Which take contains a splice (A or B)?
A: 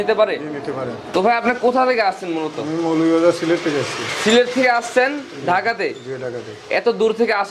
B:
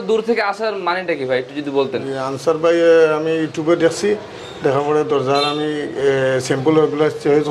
A